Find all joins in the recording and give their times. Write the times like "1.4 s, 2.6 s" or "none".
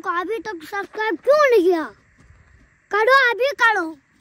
none